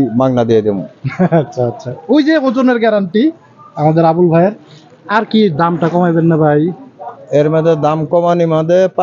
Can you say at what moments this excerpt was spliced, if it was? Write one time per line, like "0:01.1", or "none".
none